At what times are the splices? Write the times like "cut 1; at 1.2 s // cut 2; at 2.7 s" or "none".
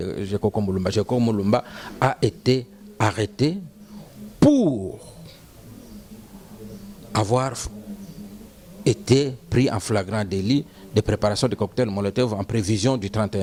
none